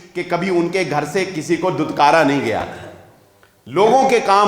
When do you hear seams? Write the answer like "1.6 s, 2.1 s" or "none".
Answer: none

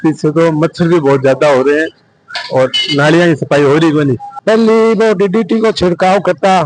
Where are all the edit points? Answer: 4.4 s

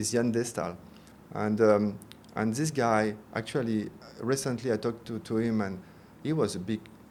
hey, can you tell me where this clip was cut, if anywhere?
none

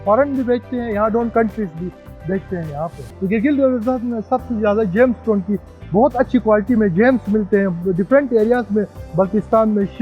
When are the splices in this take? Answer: 3.1 s

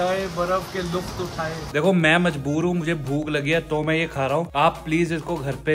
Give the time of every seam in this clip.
1.7 s

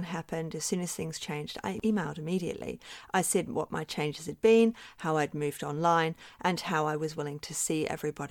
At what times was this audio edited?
1.8 s

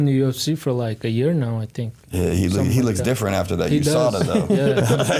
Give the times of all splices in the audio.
none

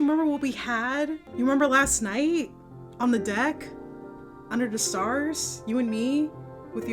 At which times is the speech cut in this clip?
none

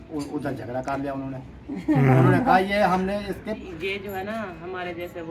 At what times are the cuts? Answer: 3.6 s

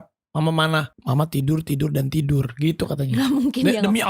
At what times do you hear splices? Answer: 0.9 s

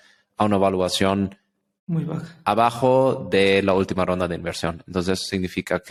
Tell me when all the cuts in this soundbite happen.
none

